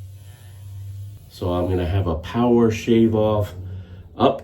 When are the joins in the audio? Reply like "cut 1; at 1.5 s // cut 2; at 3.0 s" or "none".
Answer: cut 1; at 1.2 s